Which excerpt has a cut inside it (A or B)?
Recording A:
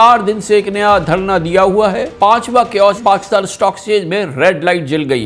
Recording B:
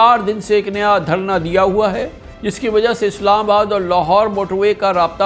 A